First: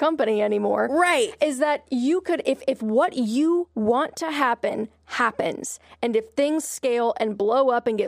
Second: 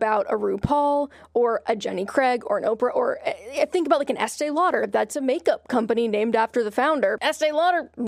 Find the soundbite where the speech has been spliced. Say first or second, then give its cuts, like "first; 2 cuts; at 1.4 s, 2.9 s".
second; 1 cut; at 7.2 s